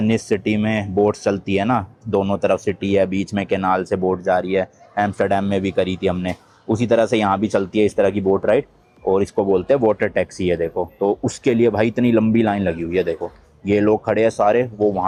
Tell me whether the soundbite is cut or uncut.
uncut